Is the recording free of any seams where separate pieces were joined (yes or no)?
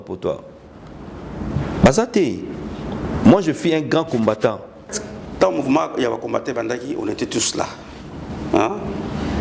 no